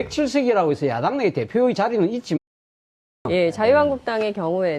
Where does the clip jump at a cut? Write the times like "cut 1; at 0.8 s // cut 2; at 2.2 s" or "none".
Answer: none